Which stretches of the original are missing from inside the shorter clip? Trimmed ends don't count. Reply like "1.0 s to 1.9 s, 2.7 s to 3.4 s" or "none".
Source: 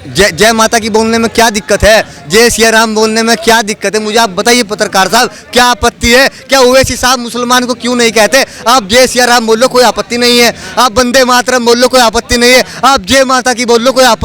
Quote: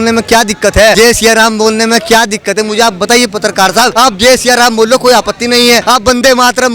2.0 s to 2.3 s, 5.3 s to 8.6 s, 10.5 s to 10.7 s